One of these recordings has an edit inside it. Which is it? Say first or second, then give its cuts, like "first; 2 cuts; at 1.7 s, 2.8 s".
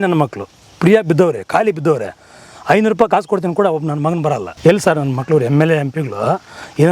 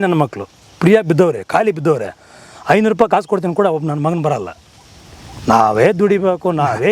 first; 1 cut; at 4.5 s